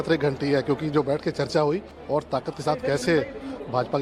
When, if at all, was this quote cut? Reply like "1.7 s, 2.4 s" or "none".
1.9 s